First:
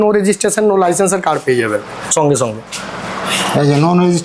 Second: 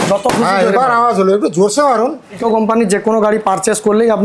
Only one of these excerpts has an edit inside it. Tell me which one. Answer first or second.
second